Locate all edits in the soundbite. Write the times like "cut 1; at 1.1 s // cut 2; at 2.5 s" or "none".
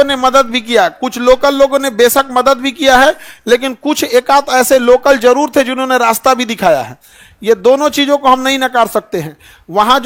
none